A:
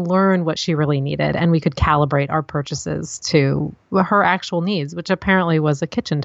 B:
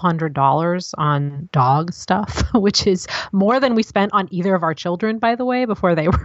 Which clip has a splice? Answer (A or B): B